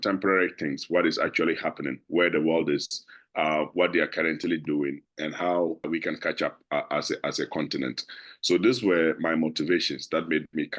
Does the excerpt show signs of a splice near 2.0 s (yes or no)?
no